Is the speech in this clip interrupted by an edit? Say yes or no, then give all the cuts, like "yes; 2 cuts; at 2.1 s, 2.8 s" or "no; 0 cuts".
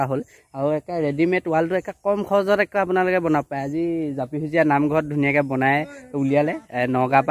no; 0 cuts